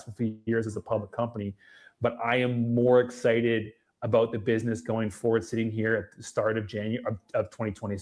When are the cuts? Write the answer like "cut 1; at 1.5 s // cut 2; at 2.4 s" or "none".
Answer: none